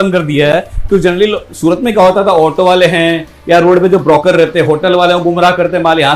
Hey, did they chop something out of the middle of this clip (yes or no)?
no